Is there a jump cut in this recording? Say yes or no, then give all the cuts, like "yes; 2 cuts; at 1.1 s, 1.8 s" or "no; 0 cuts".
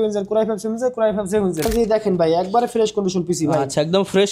yes; 1 cut; at 1.7 s